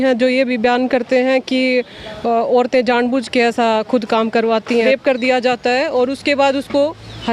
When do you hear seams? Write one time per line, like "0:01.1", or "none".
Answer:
0:04.8